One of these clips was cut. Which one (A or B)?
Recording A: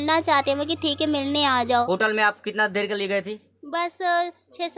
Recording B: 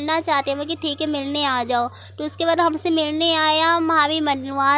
A